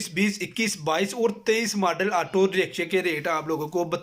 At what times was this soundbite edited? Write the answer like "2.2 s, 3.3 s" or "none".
none

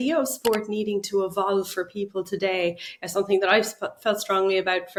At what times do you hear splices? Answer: none

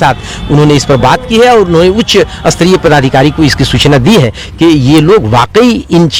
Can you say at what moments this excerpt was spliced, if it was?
none

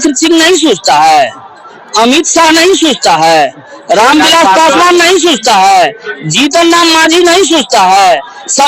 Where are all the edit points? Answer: none

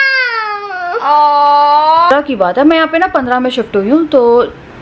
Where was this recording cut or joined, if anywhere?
2.1 s

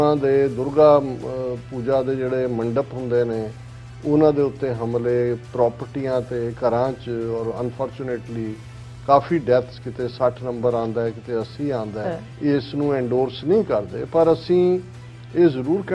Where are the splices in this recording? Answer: 12.2 s

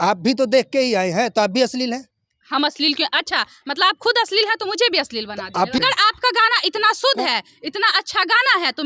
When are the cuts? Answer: 5.8 s

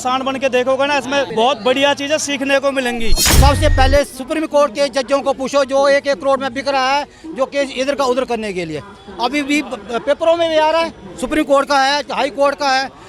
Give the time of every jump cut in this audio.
1.3 s, 3.2 s

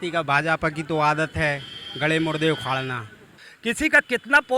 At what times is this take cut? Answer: 3.5 s

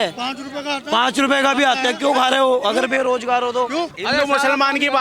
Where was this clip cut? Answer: 4.0 s

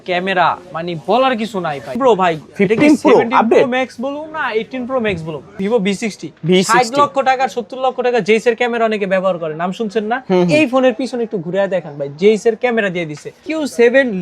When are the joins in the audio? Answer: 2.0 s, 5.6 s, 13.4 s

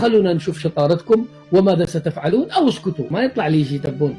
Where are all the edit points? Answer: 3.1 s

